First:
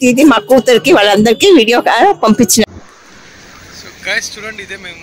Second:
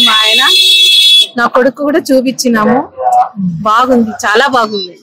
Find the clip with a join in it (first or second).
first